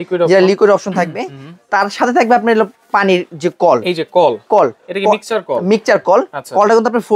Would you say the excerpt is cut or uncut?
uncut